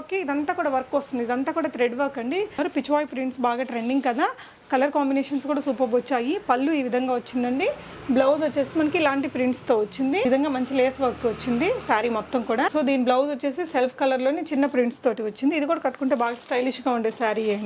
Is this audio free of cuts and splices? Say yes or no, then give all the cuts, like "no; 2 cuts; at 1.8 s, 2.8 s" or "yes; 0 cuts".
no; 3 cuts; at 2.6 s, 10.3 s, 12.7 s